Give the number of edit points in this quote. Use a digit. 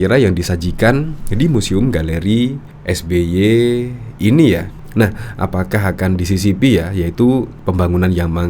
1